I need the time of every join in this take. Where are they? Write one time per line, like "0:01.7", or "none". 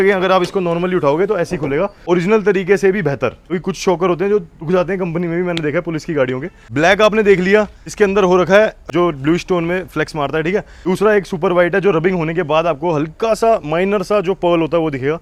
none